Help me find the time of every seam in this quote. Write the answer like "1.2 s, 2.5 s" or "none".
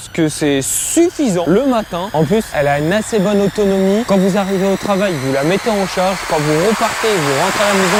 none